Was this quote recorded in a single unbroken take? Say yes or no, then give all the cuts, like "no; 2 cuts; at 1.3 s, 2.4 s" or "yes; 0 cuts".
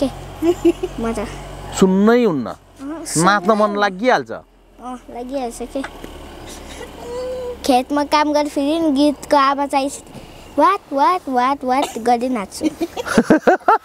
yes; 0 cuts